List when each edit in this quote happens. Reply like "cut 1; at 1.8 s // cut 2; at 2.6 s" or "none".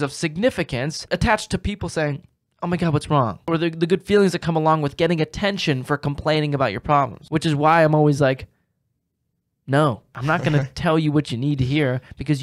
cut 1; at 1.0 s // cut 2; at 3.4 s // cut 3; at 7.2 s // cut 4; at 10.1 s